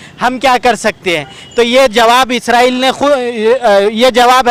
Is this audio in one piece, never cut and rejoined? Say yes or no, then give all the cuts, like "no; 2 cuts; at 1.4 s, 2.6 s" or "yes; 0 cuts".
yes; 0 cuts